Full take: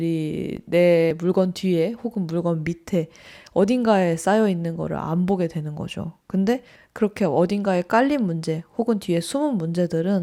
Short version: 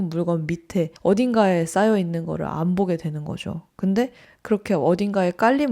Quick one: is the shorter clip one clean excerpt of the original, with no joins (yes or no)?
no